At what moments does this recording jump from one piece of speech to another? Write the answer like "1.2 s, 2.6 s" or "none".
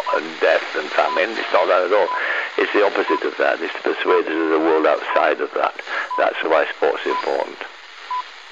none